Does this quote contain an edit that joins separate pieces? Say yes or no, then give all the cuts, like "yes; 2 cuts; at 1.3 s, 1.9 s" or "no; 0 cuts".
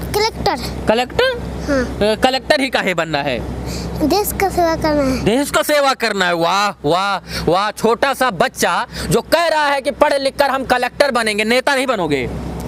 no; 0 cuts